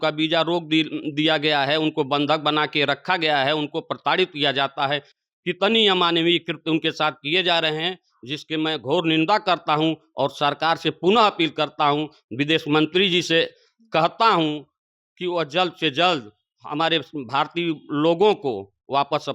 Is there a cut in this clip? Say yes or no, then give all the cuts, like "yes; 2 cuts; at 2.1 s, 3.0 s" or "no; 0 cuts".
no; 0 cuts